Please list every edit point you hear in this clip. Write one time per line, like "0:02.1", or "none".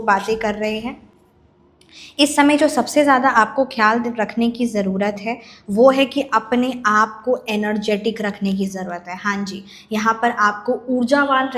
none